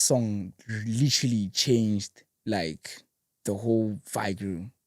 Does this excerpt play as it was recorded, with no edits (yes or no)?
yes